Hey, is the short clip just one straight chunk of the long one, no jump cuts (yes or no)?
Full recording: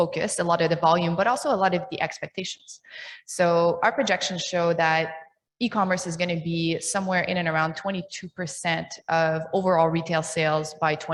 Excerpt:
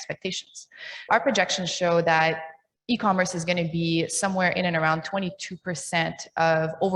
no